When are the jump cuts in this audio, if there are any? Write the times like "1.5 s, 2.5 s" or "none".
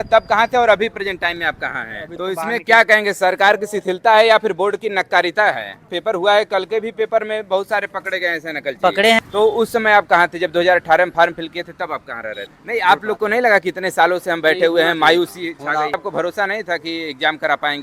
2.2 s, 5.9 s, 9.2 s, 12.5 s, 15.9 s